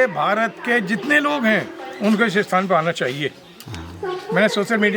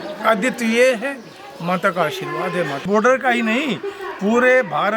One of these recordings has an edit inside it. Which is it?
second; 1 cut; at 2.8 s

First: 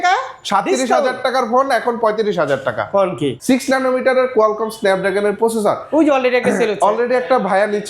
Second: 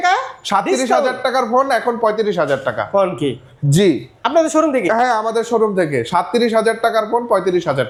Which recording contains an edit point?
first; 1 cut; at 3.4 s

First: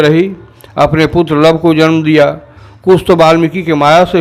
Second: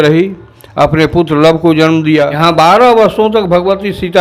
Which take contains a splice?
second; 1 cut; at 2.3 s

